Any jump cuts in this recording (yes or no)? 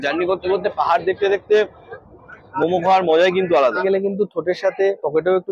yes